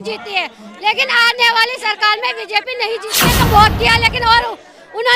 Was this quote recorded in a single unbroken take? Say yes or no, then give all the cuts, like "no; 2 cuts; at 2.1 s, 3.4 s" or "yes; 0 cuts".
no; 1 cut; at 3.2 s